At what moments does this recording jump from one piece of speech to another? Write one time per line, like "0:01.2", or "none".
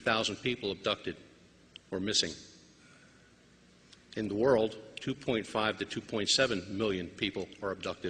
0:03.9